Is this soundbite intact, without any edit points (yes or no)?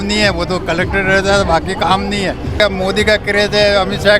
no